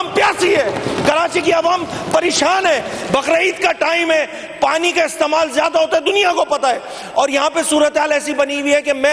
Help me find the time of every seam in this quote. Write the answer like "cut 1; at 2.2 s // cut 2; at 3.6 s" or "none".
none

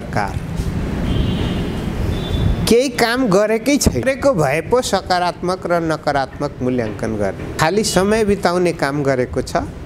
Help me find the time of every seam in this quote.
cut 1; at 4.0 s // cut 2; at 7.6 s

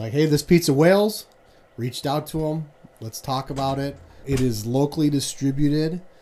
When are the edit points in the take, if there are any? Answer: cut 1; at 4.2 s

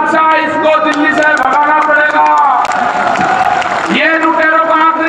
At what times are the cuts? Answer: none

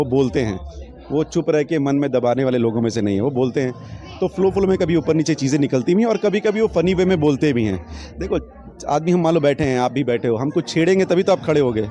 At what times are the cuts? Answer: none

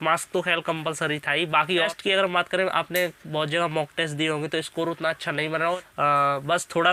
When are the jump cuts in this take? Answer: cut 1; at 1.8 s // cut 2; at 5.8 s

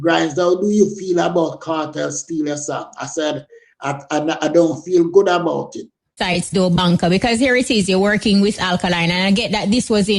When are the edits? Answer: cut 1; at 6.2 s

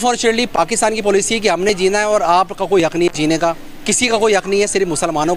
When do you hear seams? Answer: none

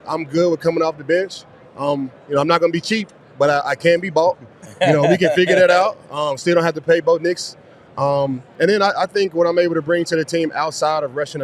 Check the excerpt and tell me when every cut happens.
none

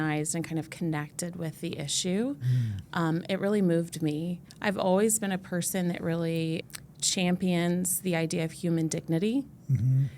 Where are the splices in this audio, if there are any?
cut 1; at 6.6 s

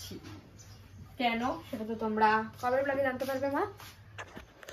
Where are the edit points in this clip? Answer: none

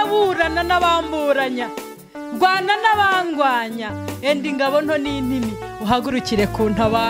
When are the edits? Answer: none

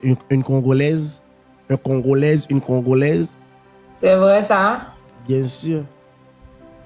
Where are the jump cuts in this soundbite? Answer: none

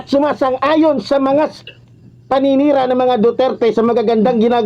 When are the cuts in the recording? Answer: none

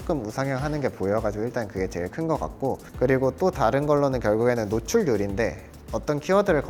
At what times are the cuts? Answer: none

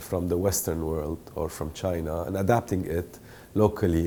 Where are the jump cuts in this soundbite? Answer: none

